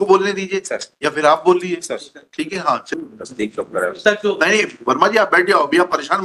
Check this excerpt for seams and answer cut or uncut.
cut